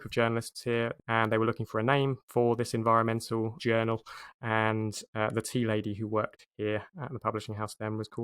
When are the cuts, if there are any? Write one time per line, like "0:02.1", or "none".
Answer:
0:01.0
0:02.2
0:03.6
0:06.4